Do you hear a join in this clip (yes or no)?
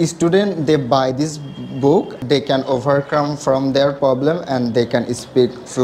yes